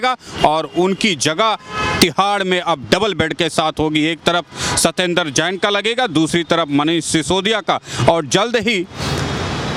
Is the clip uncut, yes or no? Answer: yes